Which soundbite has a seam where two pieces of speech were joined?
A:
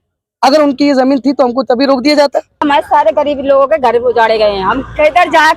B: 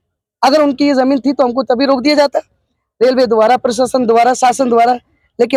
A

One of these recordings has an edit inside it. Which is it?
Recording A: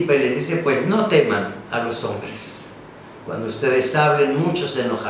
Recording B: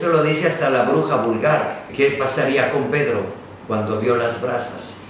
B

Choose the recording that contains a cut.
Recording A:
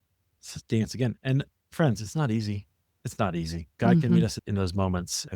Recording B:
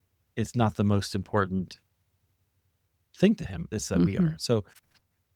A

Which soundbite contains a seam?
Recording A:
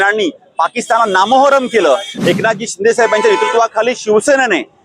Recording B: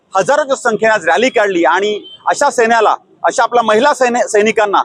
A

